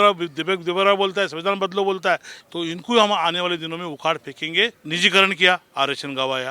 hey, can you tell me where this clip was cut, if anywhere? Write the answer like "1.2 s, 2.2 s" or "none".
2.4 s, 4.8 s